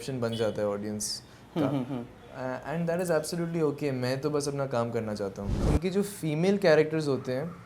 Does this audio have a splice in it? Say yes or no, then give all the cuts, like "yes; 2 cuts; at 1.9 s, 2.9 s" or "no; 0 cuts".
yes; 1 cut; at 5.5 s